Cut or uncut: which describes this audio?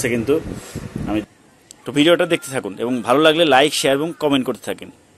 cut